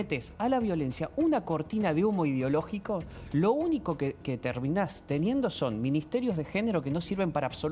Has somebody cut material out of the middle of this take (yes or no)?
no